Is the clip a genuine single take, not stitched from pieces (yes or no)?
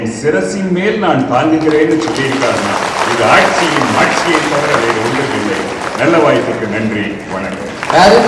yes